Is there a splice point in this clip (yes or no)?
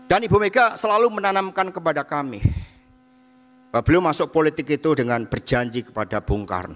no